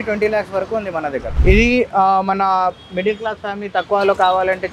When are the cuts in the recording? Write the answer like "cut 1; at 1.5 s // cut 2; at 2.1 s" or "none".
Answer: cut 1; at 1.3 s